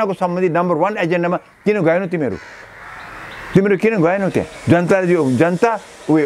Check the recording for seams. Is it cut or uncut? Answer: uncut